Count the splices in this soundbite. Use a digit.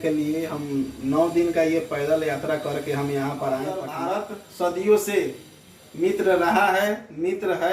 1